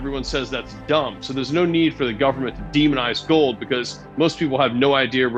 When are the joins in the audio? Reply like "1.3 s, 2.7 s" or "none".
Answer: none